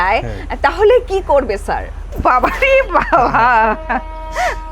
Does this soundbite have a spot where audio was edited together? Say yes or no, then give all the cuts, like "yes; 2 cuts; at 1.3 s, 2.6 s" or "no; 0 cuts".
yes; 1 cut; at 2.1 s